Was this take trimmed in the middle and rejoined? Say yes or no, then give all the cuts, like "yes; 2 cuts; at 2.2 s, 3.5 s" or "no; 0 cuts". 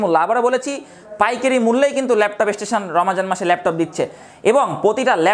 no; 0 cuts